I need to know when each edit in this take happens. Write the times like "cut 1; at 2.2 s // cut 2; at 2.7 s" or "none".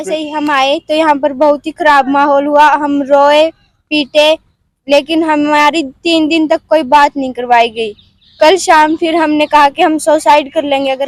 none